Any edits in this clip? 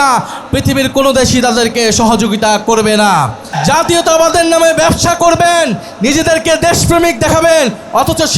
yes; 1 cut; at 3.5 s

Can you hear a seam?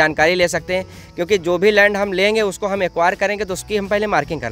no; 0 cuts

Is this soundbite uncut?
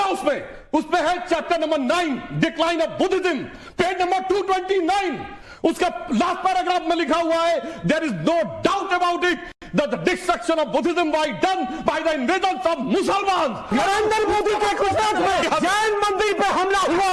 no; 2 cuts; at 14.1 s, 15.4 s

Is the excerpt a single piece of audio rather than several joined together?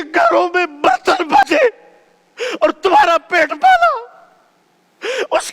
no; 1 cut; at 1.4 s

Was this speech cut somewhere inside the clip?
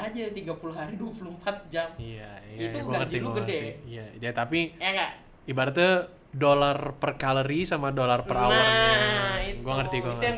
no; 0 cuts

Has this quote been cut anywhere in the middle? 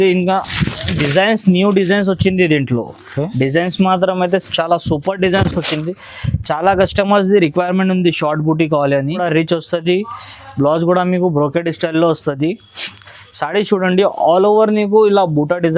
yes; 1 cut; at 9.2 s

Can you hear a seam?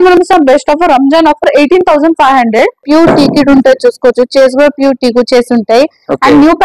yes; 1 cut; at 2.8 s

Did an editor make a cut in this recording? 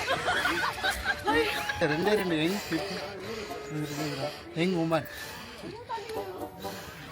yes; 1 cut; at 1.8 s

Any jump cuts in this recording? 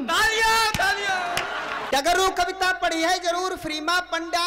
yes; 1 cut; at 1.8 s

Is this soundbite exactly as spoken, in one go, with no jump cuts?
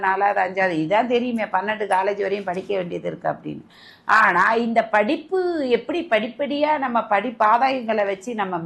yes; 0 cuts

